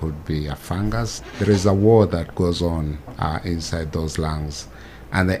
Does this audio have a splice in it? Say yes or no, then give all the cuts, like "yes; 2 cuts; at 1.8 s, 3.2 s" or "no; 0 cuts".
yes; 1 cut; at 1.1 s